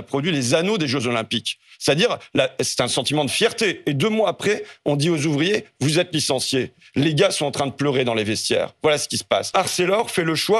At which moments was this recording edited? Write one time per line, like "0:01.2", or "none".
0:09.5